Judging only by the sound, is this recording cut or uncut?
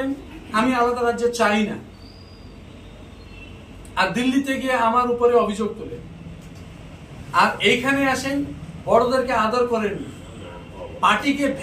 uncut